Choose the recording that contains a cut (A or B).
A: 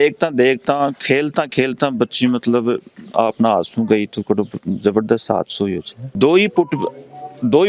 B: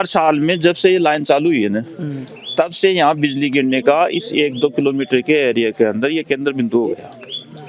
A